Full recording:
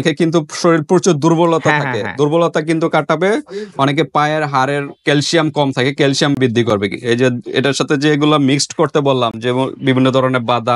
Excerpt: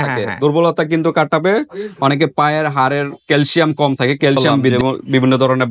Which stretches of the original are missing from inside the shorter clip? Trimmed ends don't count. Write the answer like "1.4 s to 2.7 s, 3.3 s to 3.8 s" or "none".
6.5 s to 9.5 s